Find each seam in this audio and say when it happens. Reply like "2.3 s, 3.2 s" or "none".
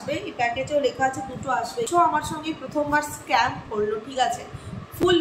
1.9 s

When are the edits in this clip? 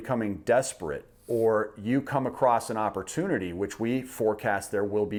none

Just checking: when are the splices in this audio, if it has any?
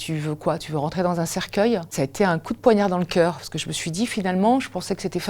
1.9 s

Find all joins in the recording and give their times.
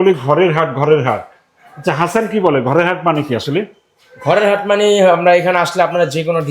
none

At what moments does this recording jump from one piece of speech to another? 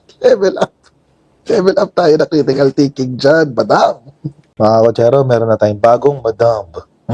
none

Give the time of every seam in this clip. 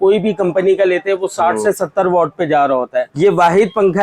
3.1 s

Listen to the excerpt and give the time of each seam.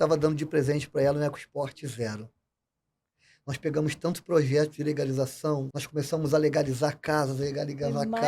5.7 s

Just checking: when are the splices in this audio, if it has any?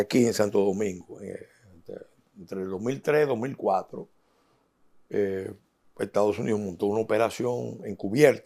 none

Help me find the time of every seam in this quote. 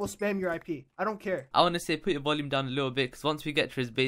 none

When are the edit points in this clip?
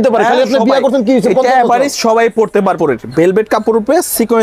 2.8 s

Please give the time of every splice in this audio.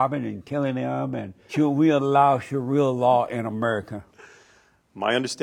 1.6 s

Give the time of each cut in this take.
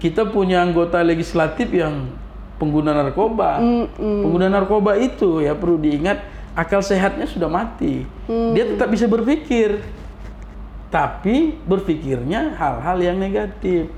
none

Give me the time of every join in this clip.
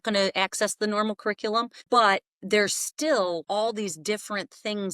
1.8 s, 3.4 s

